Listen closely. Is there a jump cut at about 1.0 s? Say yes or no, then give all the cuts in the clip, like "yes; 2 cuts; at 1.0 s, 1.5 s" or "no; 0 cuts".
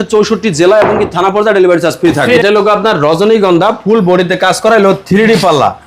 no; 1 cut; at 2.4 s